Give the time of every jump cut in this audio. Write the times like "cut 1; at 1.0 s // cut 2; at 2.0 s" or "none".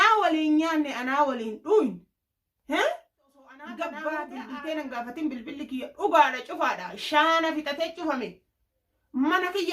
cut 1; at 4.4 s